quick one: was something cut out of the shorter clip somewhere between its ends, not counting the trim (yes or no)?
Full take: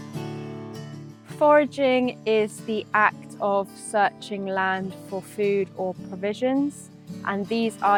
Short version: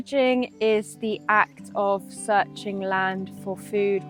no